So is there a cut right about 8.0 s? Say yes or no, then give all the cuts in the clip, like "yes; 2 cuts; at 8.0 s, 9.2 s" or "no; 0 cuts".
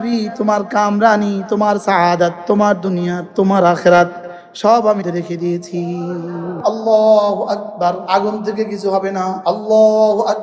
yes; 4 cuts; at 5.0 s, 6.6 s, 8.0 s, 9.4 s